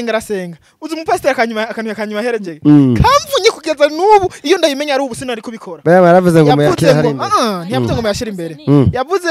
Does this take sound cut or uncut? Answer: uncut